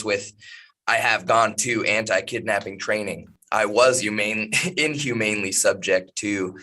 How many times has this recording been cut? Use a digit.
1